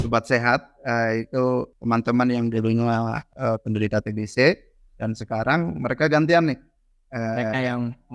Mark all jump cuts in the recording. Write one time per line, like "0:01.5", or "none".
0:01.7
0:03.2